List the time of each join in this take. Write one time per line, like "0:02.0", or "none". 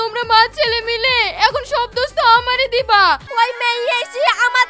0:03.3